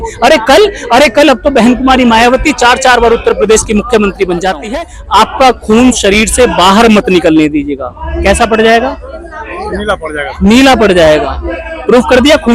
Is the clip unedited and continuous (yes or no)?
no